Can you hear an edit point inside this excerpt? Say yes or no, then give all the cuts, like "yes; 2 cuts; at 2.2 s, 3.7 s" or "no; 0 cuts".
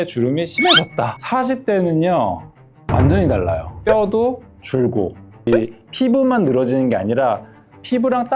yes; 3 cuts; at 1.2 s, 3.7 s, 5.5 s